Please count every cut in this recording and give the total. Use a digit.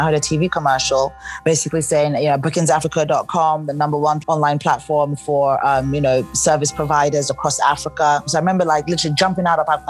2